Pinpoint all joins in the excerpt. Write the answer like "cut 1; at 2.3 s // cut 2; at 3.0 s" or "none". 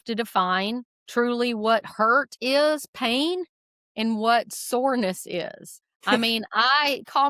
cut 1; at 0.9 s // cut 2; at 6.2 s